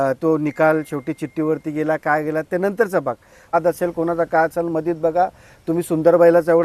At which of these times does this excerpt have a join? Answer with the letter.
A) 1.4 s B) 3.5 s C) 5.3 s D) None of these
B